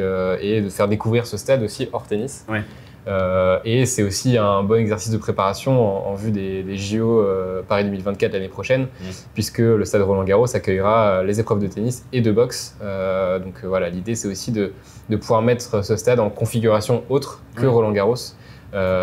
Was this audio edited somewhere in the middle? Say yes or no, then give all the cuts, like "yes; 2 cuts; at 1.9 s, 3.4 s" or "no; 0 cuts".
no; 0 cuts